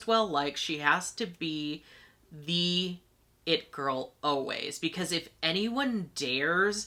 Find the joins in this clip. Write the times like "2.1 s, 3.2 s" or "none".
none